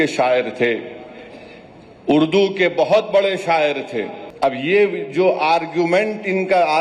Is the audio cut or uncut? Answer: cut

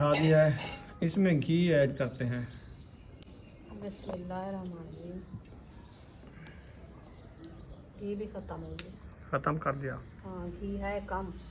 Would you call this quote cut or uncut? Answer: uncut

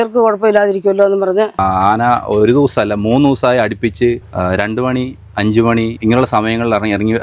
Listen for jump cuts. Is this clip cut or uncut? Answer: cut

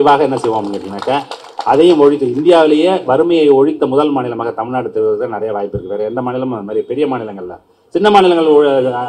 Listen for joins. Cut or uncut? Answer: uncut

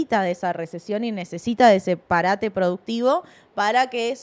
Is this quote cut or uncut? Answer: uncut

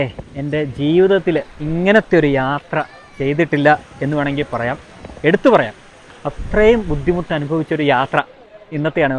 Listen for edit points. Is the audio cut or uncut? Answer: uncut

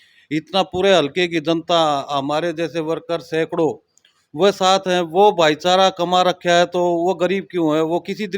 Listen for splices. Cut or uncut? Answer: uncut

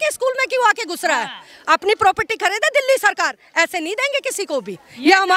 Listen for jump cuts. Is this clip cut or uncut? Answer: uncut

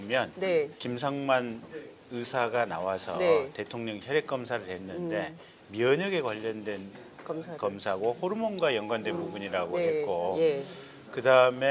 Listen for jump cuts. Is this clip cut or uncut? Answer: cut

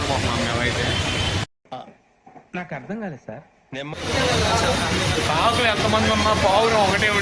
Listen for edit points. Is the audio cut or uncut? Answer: cut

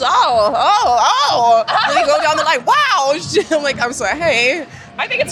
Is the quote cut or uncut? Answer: uncut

